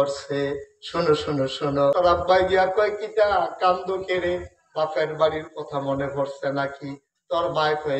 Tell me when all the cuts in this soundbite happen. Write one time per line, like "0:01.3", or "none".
0:01.9